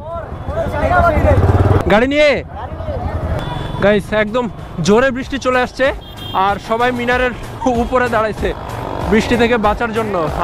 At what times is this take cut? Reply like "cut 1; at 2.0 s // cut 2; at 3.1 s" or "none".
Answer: cut 1; at 1.8 s // cut 2; at 3.4 s

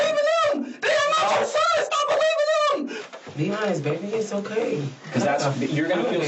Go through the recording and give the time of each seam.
cut 1; at 3.0 s

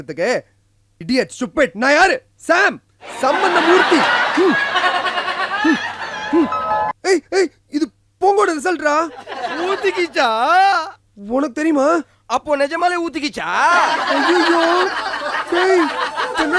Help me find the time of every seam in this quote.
cut 1; at 6.9 s

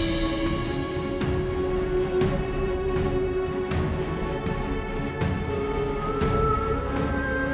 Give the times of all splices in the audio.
none

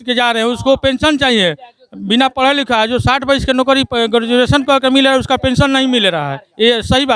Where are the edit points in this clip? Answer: none

